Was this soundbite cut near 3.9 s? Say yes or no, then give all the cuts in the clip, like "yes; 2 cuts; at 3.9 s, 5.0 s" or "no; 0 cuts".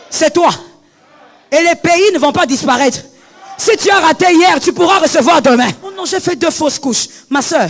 no; 1 cut; at 6.0 s